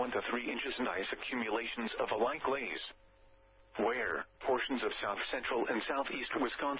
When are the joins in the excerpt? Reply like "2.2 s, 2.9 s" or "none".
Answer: 5.2 s